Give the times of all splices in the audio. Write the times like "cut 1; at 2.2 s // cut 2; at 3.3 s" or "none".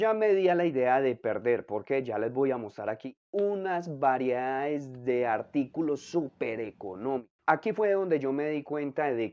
cut 1; at 3.1 s // cut 2; at 7.3 s